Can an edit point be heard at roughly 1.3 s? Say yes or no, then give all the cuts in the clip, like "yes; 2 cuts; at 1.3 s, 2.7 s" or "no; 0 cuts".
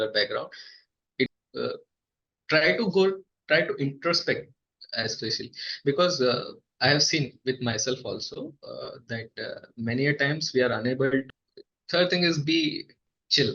yes; 2 cuts; at 1.3 s, 11.2 s